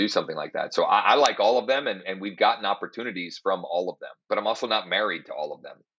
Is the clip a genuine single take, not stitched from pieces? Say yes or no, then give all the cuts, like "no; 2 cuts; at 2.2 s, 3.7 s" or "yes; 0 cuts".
no; 1 cut; at 4.1 s